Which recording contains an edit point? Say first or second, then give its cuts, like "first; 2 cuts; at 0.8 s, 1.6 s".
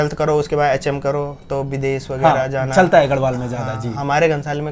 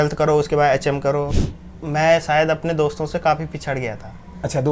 second; 1 cut; at 1.4 s